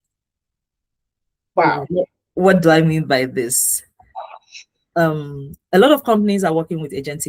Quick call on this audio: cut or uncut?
uncut